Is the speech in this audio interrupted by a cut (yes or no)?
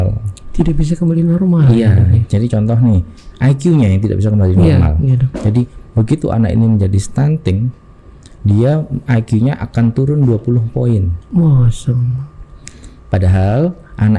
no